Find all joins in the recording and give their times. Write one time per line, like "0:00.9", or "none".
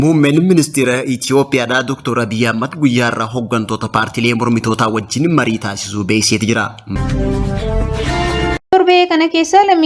0:06.8
0:08.7